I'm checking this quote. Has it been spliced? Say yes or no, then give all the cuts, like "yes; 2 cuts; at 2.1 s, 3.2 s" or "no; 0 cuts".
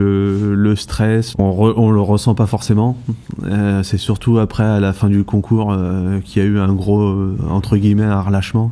yes; 1 cut; at 1.3 s